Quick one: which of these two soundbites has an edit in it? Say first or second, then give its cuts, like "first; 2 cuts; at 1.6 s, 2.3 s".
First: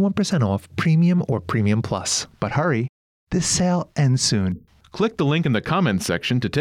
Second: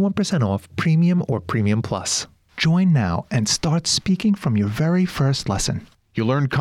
second; 1 cut; at 2.2 s